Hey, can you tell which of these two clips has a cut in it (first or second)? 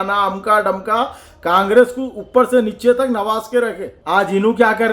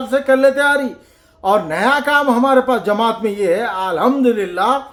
first